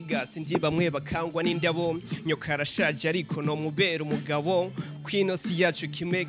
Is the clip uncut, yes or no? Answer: yes